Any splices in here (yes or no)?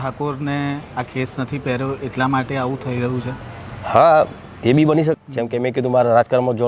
yes